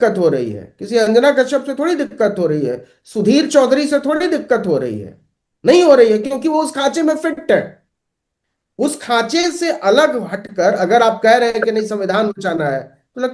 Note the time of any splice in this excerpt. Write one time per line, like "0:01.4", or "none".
none